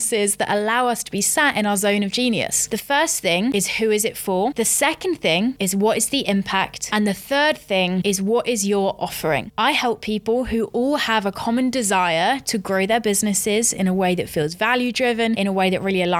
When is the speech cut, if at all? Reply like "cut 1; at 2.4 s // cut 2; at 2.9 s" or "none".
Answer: cut 1; at 2.7 s // cut 2; at 3.5 s // cut 3; at 4.5 s // cut 4; at 6.8 s // cut 5; at 8.0 s // cut 6; at 9.5 s // cut 7; at 15.4 s